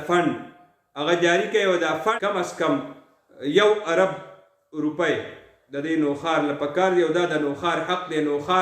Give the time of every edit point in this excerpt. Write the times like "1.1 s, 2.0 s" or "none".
2.1 s